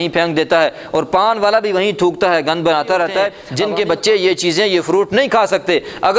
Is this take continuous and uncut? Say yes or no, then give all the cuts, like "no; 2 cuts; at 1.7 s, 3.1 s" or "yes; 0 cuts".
no; 1 cut; at 3.4 s